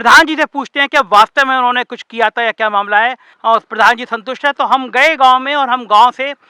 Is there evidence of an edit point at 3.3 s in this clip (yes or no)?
yes